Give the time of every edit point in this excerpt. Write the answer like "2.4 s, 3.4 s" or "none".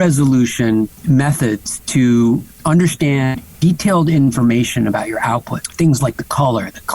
1.0 s, 5.6 s